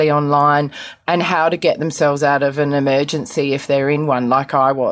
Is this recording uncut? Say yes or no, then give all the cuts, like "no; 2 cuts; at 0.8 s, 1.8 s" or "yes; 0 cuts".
yes; 0 cuts